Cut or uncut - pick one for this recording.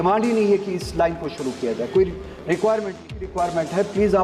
cut